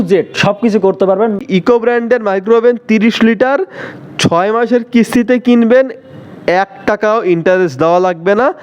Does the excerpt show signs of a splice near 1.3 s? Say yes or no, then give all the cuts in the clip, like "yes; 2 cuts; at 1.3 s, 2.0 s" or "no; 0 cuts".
yes; 1 cut; at 1.3 s